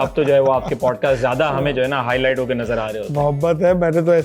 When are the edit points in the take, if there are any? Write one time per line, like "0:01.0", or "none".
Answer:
none